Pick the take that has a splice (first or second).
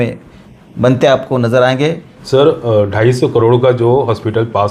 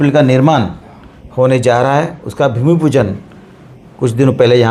first